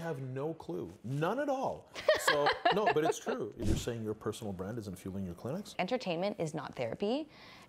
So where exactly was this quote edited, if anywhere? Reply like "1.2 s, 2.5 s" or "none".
3.6 s, 5.7 s